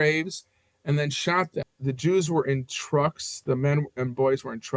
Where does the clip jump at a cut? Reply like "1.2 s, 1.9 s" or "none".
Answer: 1.7 s